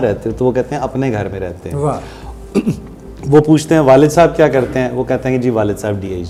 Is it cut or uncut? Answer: uncut